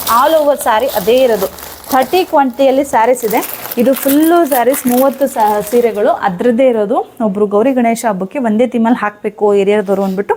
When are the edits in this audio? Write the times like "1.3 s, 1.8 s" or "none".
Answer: none